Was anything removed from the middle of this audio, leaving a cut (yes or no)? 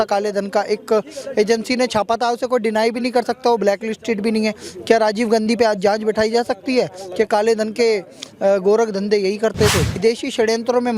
yes